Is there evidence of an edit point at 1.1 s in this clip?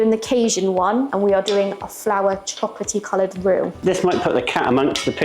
yes; 1 cut; at 1.1 s

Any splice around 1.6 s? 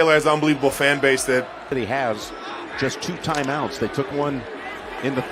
no; 0 cuts

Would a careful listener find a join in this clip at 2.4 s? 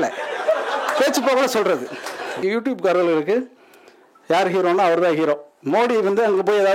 yes; 1 cut; at 2.4 s

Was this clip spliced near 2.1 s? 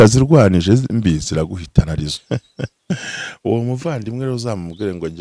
yes; 1 cut; at 2.1 s

